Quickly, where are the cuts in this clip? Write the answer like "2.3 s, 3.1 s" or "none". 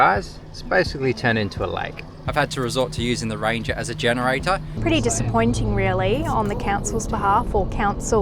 2.2 s, 4.7 s